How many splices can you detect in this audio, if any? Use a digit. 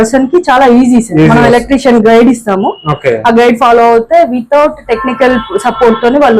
0